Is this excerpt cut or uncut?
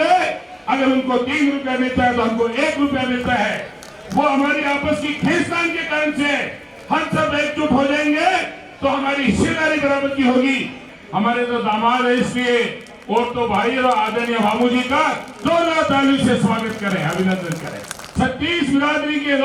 cut